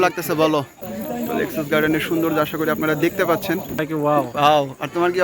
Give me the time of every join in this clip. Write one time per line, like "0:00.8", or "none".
0:00.9
0:03.8